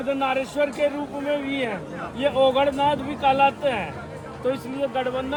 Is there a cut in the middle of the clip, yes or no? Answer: no